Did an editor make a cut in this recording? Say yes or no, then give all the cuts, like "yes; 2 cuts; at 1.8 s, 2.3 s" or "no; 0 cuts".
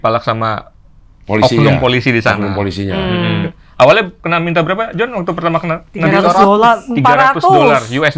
yes; 1 cut; at 3.5 s